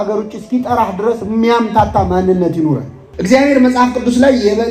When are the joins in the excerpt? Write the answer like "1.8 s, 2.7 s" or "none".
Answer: 3.0 s